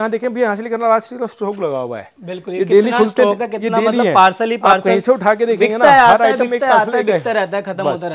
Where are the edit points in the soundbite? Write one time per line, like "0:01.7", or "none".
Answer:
none